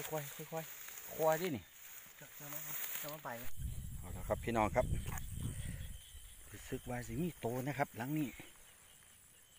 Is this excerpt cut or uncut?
cut